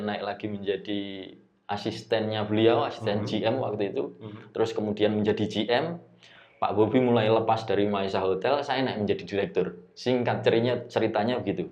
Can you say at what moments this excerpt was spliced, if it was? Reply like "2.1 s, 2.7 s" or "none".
none

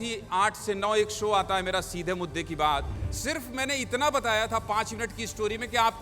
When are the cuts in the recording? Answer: 3.1 s

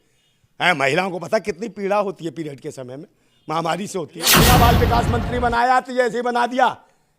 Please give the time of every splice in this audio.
4.3 s

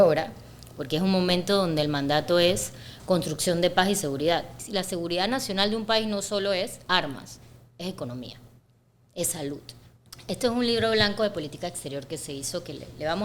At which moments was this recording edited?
4.6 s, 9.9 s

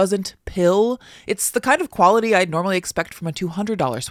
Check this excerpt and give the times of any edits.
none

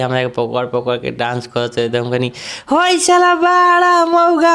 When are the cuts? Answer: none

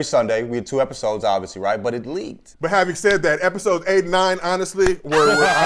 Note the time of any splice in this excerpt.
2.4 s

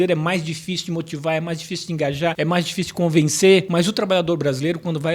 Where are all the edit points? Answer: 2.3 s, 3.7 s

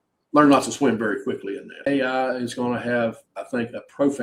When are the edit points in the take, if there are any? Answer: 1.9 s

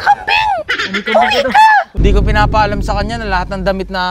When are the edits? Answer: 1.9 s

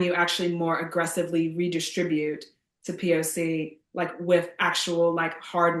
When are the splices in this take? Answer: none

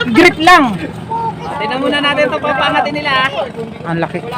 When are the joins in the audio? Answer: 1.5 s

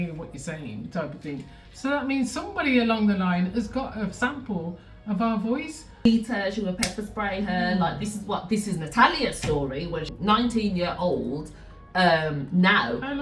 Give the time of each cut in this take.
6.0 s, 10.1 s

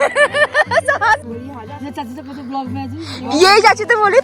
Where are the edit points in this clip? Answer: 1.2 s

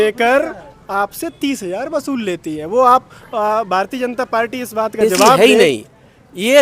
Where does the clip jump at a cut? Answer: 5.4 s

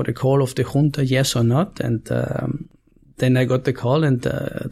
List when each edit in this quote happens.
none

